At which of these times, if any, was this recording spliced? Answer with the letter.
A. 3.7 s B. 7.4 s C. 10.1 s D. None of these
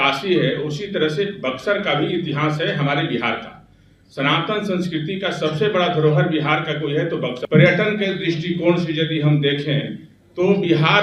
B